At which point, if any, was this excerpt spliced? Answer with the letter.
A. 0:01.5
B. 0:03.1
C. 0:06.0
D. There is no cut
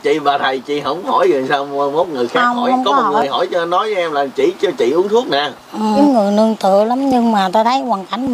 C